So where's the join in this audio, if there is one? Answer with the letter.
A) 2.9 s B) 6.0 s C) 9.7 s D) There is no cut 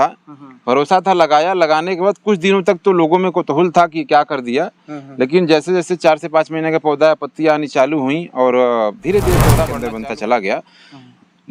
C